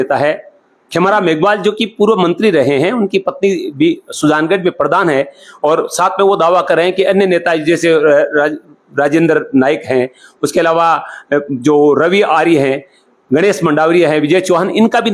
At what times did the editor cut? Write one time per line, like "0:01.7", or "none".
none